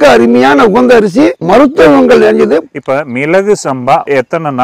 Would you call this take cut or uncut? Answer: cut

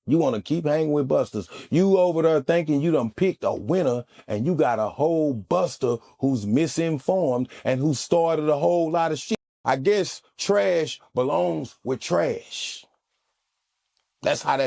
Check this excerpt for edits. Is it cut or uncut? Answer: uncut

